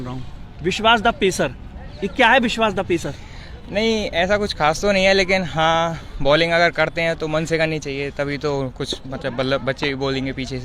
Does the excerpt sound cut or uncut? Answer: uncut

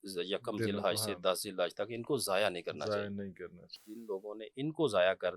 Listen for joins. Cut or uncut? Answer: cut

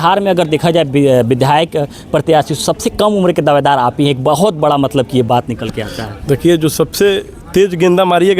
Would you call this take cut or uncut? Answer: uncut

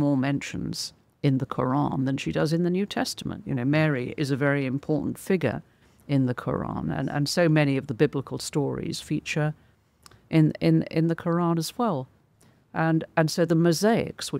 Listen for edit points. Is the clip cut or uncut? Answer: uncut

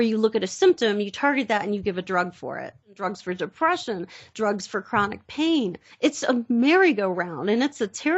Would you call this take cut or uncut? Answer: cut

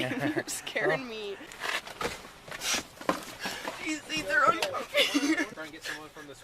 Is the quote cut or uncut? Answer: cut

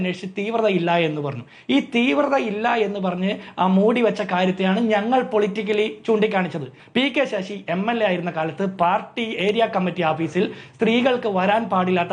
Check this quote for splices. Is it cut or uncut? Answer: cut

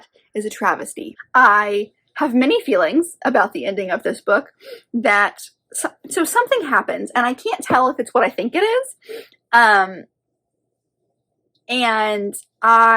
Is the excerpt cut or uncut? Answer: cut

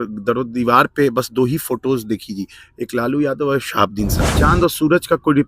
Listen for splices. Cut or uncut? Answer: cut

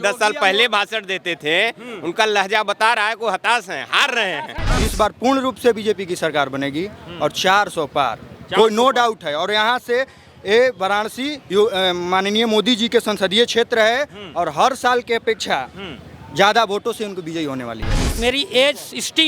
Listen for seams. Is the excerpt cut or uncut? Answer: cut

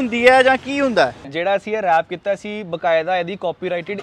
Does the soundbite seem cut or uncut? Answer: cut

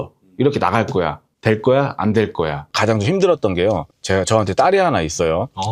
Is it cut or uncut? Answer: cut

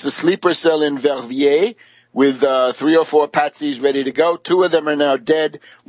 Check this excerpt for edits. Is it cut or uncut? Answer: uncut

